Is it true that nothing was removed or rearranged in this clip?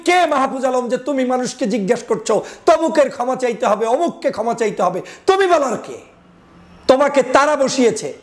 yes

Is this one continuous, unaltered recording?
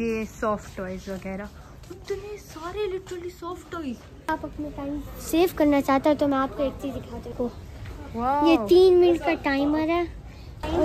no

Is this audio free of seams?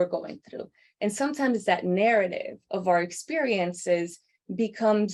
yes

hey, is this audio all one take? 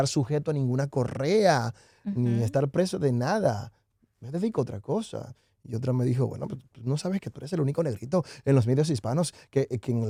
yes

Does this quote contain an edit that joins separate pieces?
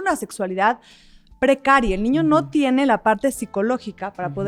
no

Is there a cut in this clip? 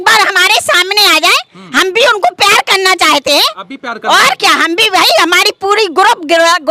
no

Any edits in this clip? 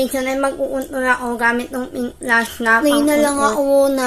yes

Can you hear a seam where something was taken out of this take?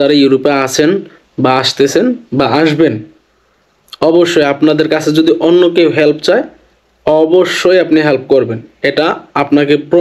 no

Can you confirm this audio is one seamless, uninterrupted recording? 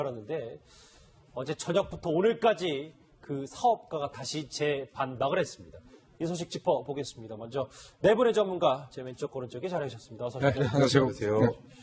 no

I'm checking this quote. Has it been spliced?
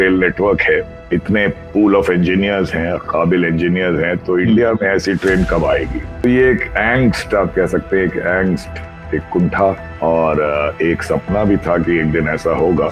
yes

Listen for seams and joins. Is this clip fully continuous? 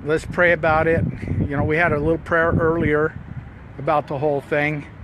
no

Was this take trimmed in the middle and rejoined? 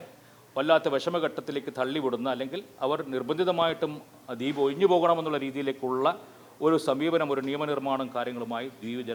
no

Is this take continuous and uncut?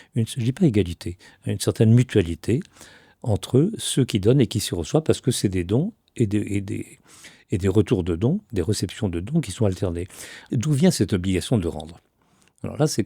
no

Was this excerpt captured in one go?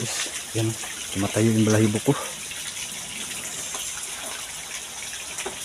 yes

